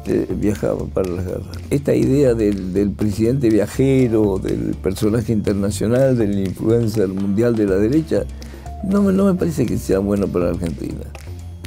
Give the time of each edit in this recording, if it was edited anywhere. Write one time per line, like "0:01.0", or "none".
0:01.5

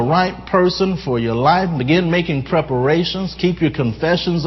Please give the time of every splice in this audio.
none

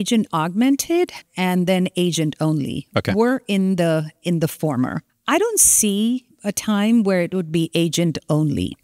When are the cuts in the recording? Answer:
none

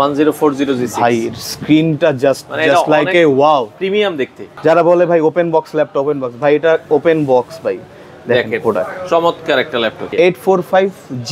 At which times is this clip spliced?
0:04.4
0:10.1

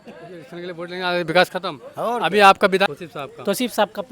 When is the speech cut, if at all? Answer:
0:02.9

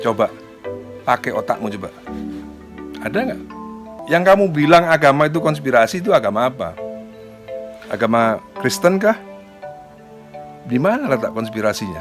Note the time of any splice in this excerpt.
0:04.0

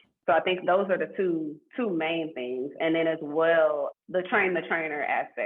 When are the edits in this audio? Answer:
0:03.9

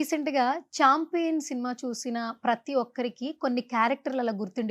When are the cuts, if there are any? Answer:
none

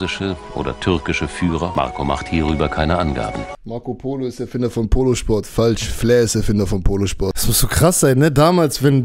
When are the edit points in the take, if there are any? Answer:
0:01.7
0:03.6
0:07.3

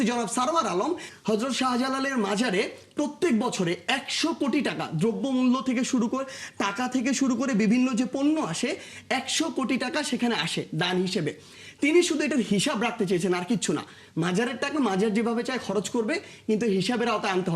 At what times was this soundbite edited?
0:01.1

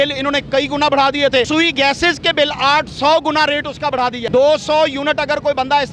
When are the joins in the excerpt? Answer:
0:01.5
0:04.2

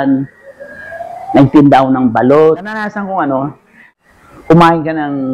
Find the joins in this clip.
0:02.9

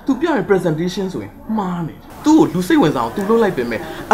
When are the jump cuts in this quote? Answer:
0:02.1

